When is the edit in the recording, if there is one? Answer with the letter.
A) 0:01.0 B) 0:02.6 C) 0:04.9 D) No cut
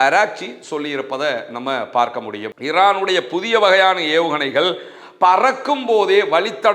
B